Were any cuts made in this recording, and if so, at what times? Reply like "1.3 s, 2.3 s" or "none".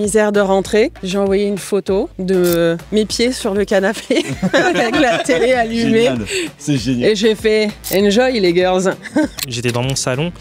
1.0 s, 2.2 s, 7.8 s, 9.4 s